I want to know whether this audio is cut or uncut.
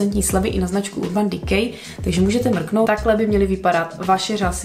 cut